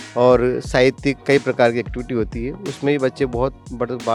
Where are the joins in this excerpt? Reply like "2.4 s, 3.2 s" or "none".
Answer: none